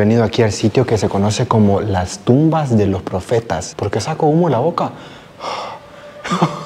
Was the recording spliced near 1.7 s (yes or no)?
no